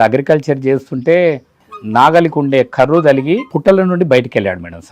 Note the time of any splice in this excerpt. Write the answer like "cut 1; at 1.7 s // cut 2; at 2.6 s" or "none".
cut 1; at 1.6 s // cut 2; at 3.5 s